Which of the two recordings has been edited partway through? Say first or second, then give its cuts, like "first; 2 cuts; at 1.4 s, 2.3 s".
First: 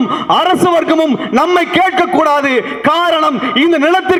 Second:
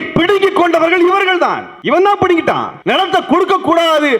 second; 2 cuts; at 1.7 s, 2.7 s